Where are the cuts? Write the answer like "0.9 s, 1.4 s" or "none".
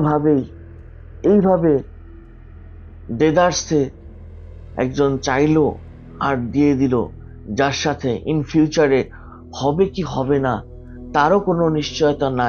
none